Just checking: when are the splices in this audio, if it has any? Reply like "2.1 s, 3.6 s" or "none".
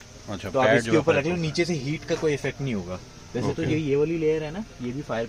none